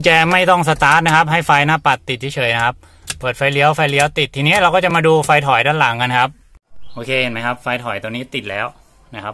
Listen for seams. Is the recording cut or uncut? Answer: uncut